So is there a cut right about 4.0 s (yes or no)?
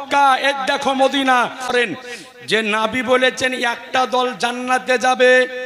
no